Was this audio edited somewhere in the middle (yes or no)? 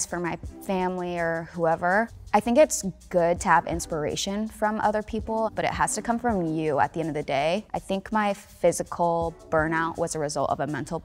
yes